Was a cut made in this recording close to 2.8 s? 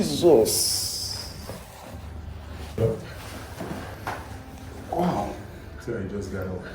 yes; 1 cut; at 2.8 s

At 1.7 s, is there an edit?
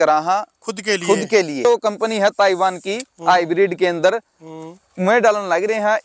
yes; 1 cut; at 1.7 s

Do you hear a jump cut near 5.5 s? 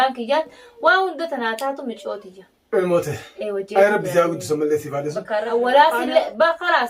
yes; 1 cut; at 5.5 s

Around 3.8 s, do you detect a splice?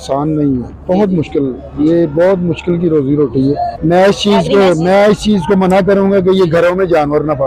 yes; 1 cut; at 3.8 s

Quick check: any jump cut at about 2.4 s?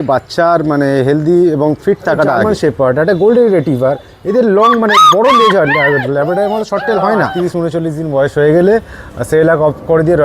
yes; 2 cuts; at 2.4 s, 7.3 s

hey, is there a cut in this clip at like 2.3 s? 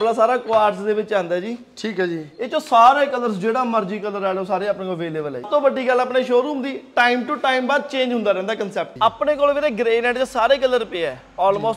no; 2 cuts; at 5.5 s, 8.9 s

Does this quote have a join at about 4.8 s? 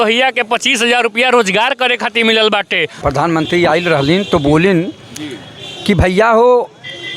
no; 1 cut; at 2.9 s

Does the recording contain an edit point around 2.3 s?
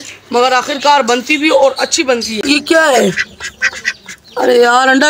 yes; 1 cut; at 2.3 s

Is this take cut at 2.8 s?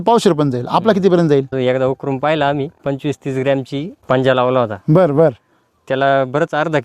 yes; 3 cuts; at 1.6 s, 2.8 s, 4.0 s

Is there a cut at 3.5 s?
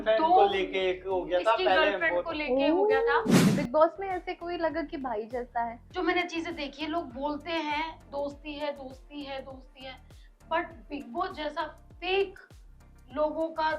yes; 2 cuts; at 3.5 s, 5.8 s

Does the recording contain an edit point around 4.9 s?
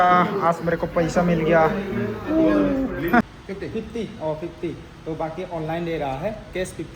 no; 1 cut; at 3.3 s

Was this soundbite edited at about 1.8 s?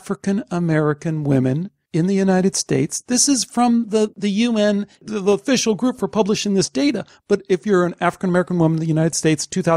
yes; 2 cuts; at 1.8 s, 4.1 s

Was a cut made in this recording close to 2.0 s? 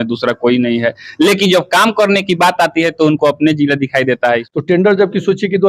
no; 1 cut; at 4.5 s

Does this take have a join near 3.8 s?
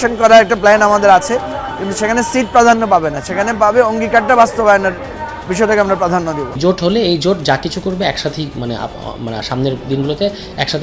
no; 1 cut; at 6.6 s

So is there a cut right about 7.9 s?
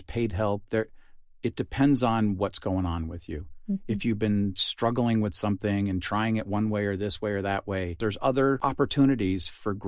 yes; 2 cuts; at 7.9 s, 8.6 s

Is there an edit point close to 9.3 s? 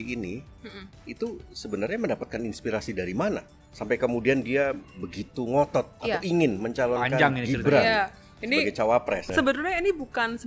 yes; 2 cuts; at 5.9 s, 9.3 s

